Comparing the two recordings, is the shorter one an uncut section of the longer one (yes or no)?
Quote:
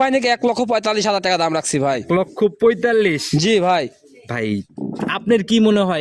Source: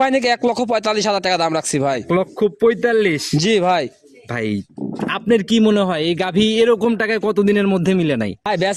yes